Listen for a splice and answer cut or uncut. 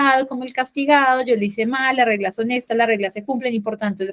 uncut